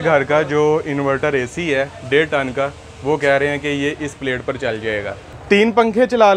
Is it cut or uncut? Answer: cut